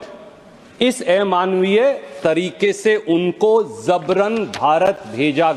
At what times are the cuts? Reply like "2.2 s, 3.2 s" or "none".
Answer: none